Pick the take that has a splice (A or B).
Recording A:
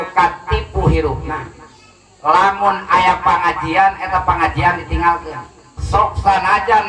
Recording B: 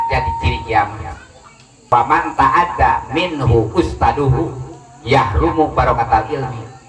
B